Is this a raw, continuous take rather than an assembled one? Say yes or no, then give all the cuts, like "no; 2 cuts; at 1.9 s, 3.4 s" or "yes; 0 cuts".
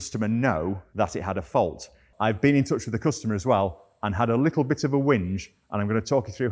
no; 2 cuts; at 0.8 s, 2.0 s